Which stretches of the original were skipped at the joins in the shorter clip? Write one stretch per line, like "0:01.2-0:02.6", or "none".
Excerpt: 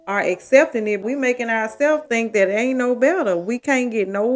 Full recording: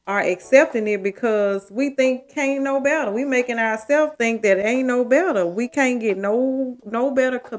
0:01.0-0:03.1